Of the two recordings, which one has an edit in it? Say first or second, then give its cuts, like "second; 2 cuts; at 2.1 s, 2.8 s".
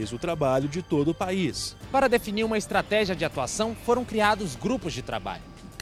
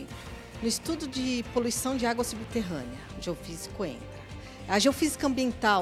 first; 1 cut; at 1.7 s